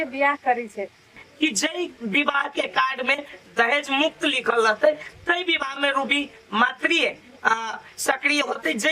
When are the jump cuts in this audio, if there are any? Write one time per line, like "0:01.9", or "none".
0:01.1